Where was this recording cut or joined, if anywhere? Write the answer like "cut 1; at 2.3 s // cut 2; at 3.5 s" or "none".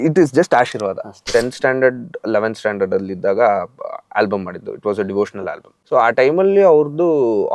cut 1; at 1.1 s